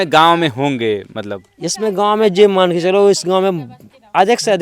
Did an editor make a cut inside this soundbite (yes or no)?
no